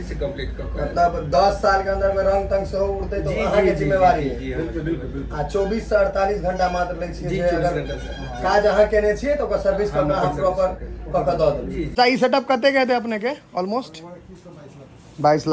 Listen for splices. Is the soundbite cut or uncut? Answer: cut